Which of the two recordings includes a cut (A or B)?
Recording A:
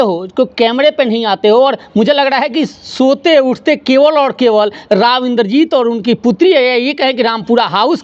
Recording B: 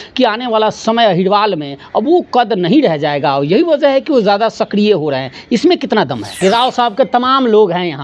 B